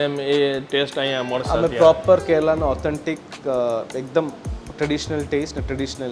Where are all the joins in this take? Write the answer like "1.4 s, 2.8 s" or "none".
none